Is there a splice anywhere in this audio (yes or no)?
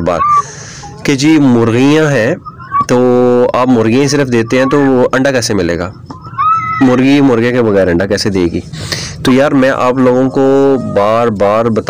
no